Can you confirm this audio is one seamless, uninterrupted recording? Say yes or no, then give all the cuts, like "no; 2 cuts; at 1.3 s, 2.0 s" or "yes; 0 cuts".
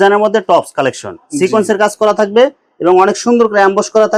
yes; 0 cuts